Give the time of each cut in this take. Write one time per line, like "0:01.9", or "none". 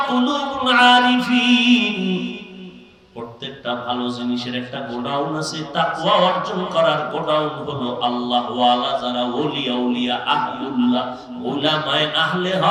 none